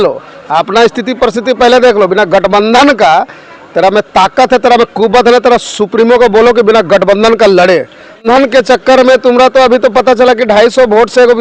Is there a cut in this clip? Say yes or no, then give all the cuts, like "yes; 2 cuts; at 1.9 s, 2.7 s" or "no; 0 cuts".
yes; 1 cut; at 8.2 s